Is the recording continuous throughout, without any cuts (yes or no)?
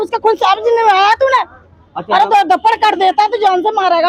yes